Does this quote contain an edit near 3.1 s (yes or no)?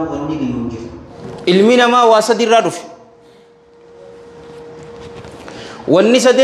no